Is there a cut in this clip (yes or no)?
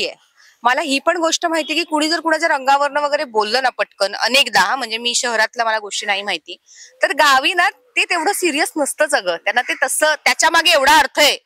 no